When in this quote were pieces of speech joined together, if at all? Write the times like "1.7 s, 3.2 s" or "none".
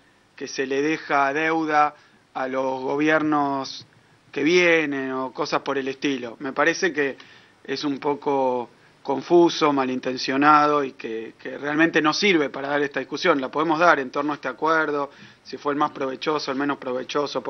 none